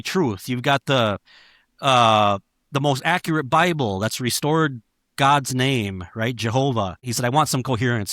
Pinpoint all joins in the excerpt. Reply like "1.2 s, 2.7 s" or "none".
7.0 s